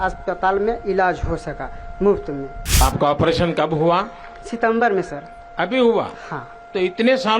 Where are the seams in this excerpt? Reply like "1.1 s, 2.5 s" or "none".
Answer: 2.8 s